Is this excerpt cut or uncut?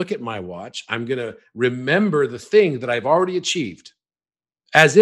uncut